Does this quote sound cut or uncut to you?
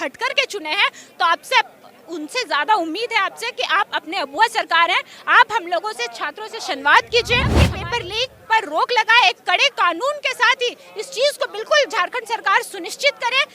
cut